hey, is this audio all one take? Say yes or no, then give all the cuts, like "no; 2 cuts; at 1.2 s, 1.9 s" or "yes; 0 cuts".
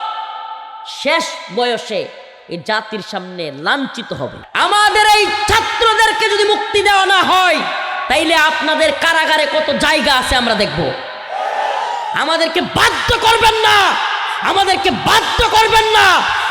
no; 1 cut; at 4.4 s